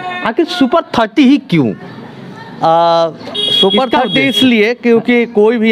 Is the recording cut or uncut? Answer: uncut